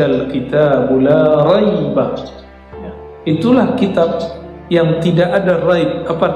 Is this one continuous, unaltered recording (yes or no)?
yes